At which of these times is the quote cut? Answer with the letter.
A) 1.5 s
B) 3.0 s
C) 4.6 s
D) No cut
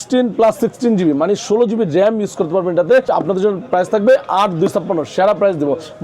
D